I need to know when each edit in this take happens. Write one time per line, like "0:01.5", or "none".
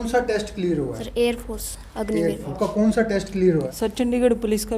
0:01.0
0:02.5
0:03.7